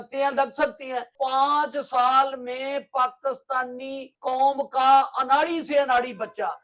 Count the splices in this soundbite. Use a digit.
2